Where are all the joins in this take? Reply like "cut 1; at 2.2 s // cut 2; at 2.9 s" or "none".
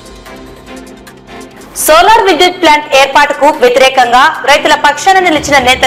none